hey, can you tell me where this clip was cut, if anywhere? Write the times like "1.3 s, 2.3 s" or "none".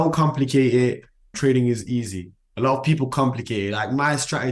1.2 s